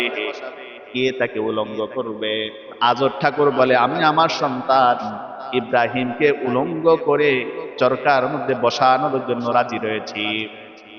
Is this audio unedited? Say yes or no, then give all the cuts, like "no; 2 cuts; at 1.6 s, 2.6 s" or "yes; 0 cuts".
no; 1 cut; at 2.8 s